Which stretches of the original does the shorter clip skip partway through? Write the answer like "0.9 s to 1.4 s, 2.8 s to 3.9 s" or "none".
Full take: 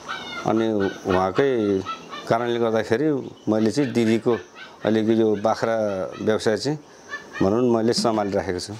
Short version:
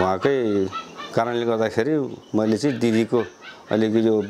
none